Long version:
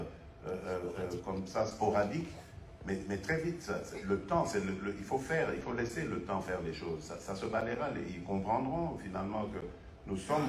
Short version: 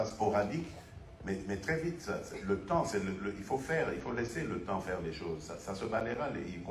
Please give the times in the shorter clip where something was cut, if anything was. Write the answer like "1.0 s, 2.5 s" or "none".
none